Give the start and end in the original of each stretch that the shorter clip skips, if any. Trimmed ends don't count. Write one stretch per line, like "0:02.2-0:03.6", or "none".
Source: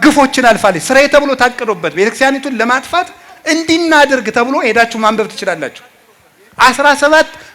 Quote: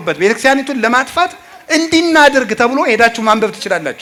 none